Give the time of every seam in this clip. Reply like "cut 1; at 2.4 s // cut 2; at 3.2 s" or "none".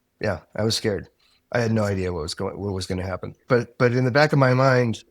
cut 1; at 3.4 s